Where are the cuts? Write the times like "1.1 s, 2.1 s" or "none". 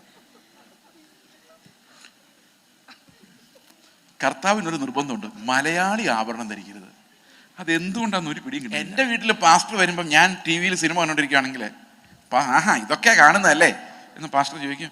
8.9 s